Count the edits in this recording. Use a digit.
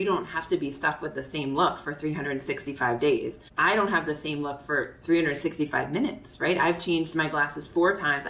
1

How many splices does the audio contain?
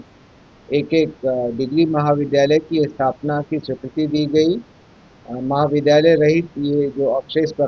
0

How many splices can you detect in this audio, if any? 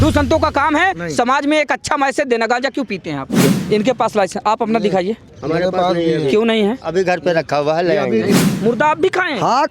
2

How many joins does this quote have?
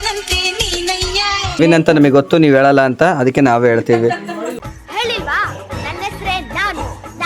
1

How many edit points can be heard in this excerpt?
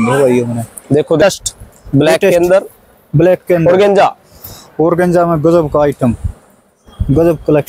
1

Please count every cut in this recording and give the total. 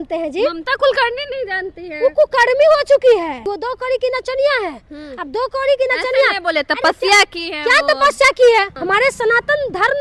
2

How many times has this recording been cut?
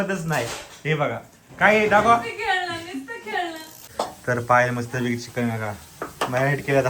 1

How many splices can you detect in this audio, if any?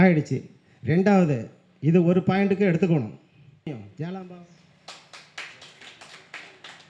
1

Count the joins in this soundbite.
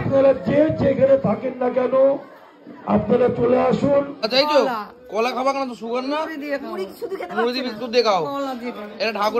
1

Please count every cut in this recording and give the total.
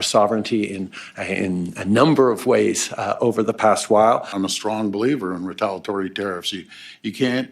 1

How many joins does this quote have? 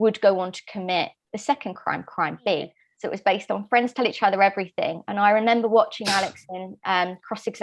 1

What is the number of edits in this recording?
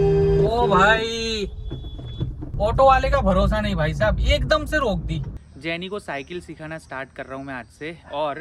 1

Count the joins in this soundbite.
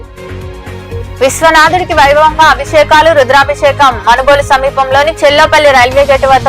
1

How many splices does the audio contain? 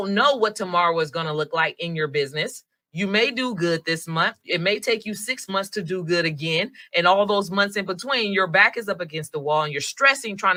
0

